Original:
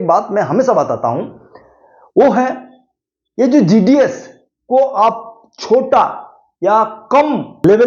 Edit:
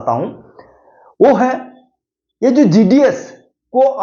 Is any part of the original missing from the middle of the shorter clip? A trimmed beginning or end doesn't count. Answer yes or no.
no